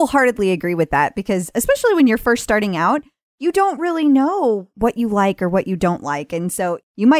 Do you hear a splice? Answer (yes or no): no